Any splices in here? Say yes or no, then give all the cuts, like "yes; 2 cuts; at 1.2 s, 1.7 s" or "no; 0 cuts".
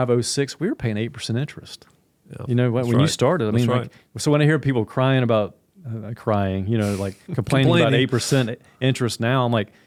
no; 0 cuts